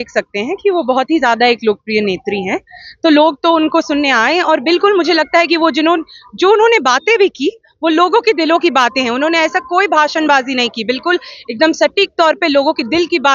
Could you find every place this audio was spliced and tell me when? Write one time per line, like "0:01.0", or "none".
none